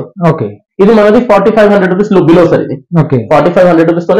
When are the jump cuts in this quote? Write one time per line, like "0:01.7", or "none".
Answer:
none